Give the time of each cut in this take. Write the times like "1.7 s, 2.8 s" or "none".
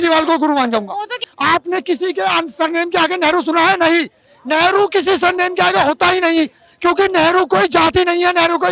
1.2 s